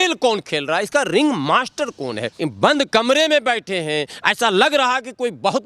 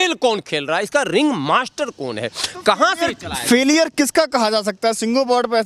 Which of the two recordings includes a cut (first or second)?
first